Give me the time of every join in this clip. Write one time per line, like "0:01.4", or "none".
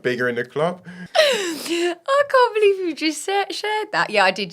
0:00.9